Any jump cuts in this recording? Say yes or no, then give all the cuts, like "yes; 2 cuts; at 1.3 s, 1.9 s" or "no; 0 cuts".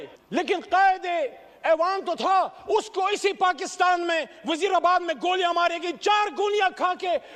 no; 0 cuts